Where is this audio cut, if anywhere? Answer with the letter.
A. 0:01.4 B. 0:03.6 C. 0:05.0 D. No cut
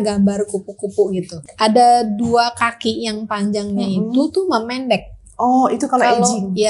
A